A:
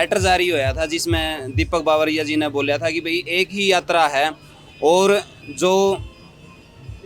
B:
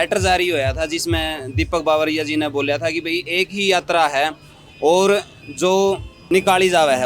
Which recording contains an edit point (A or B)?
B